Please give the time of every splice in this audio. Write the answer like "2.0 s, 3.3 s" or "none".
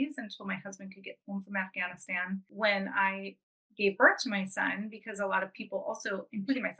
2.5 s